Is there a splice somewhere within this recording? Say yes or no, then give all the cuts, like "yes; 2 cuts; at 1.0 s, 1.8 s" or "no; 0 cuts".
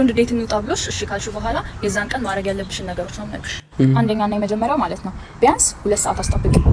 no; 0 cuts